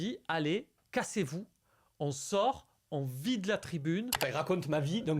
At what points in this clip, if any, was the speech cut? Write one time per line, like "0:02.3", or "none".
0:04.2